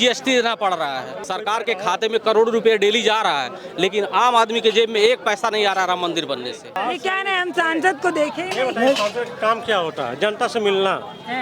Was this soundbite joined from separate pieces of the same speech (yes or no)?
yes